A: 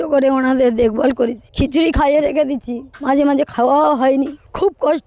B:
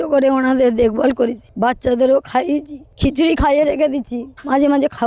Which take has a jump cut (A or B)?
A